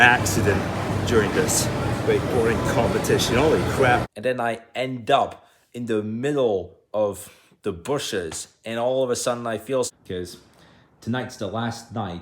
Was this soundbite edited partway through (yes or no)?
yes